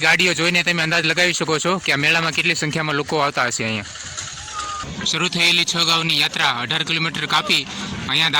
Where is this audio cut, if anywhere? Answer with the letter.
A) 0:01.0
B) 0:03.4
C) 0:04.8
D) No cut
C